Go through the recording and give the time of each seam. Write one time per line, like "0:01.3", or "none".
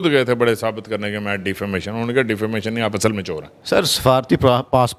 0:03.5